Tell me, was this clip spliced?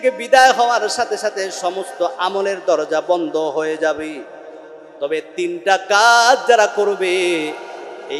no; 0 cuts

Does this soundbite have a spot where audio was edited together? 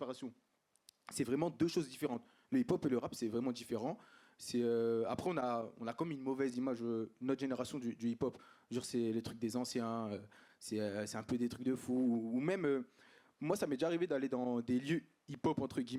no; 0 cuts

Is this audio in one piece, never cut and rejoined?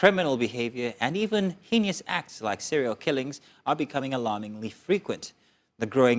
yes; 0 cuts

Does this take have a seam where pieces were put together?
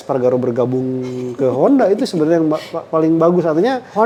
no; 0 cuts

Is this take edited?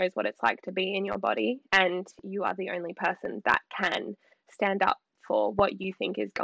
no; 0 cuts

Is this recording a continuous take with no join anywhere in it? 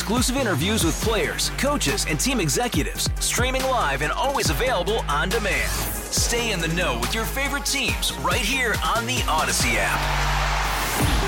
yes; 0 cuts

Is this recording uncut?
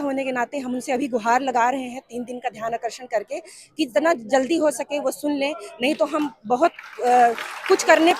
yes; 0 cuts

